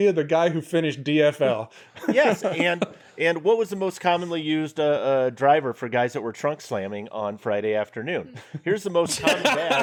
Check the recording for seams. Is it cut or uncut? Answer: uncut